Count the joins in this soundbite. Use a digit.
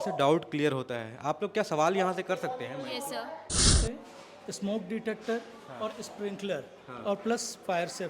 1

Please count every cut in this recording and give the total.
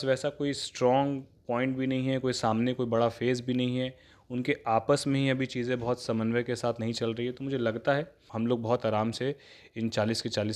1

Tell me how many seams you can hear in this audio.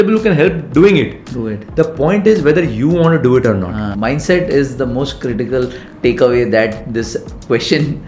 1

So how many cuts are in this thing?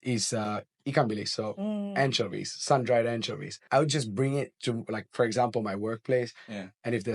1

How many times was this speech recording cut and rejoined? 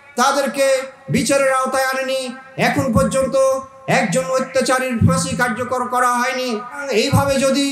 1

